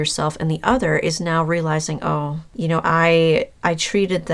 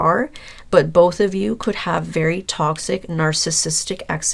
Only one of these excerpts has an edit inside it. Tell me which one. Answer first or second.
first